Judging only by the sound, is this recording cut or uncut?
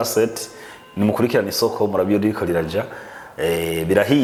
uncut